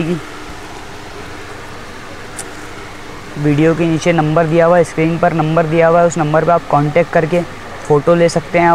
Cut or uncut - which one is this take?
uncut